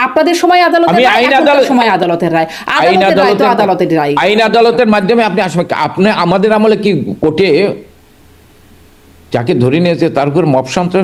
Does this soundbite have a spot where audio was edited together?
no; 0 cuts

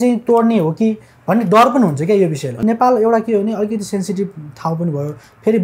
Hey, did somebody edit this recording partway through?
yes; 1 cut; at 2.6 s

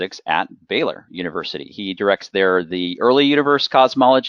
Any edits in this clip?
yes; 1 cut; at 2.5 s

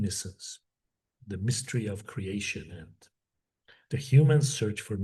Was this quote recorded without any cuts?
yes; 0 cuts

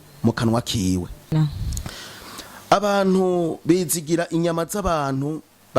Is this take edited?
yes; 1 cut; at 1.4 s

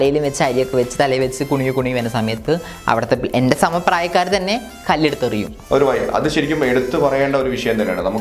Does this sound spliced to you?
yes; 1 cut; at 5.6 s

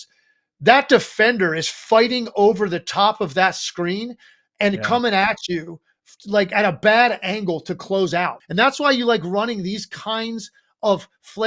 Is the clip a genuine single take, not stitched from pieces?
no; 1 cut; at 8.4 s

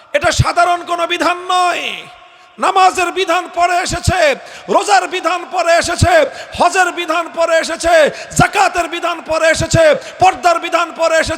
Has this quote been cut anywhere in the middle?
no; 0 cuts

